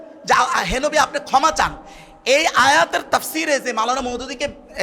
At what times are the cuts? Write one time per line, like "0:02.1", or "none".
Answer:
none